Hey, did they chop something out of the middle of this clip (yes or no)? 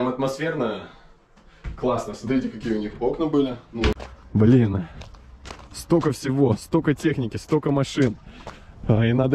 yes